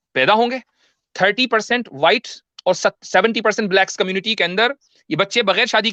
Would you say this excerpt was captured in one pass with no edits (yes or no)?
yes